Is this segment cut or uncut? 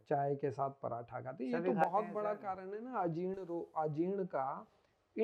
uncut